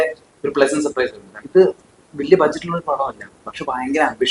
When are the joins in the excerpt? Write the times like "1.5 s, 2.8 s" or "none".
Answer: 1.4 s